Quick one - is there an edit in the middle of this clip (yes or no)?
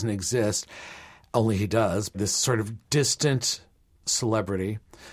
yes